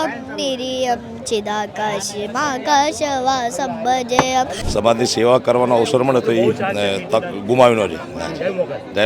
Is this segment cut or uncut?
cut